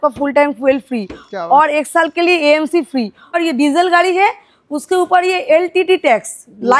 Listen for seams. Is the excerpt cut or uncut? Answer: cut